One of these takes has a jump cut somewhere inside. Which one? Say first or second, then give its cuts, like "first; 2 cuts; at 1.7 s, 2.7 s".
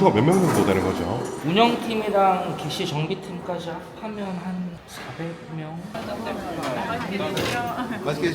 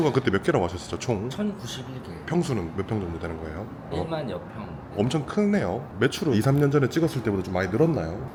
first; 1 cut; at 6.0 s